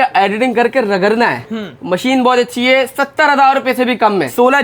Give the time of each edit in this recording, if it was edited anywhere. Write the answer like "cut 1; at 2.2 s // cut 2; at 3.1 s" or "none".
none